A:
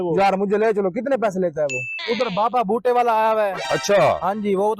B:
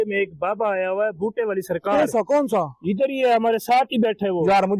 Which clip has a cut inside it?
A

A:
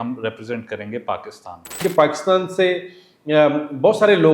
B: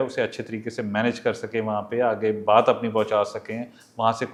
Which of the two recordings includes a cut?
A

